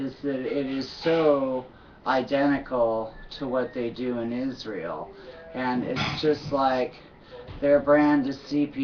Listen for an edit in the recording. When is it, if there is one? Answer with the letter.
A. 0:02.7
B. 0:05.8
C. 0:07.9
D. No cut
D